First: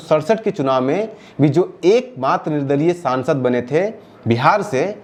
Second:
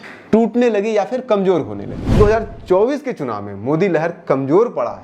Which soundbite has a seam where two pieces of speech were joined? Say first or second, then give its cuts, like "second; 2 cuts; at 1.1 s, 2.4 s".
second; 1 cut; at 2.1 s